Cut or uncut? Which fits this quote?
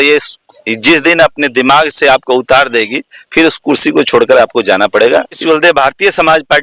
cut